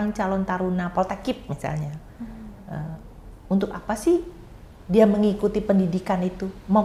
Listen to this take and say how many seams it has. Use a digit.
0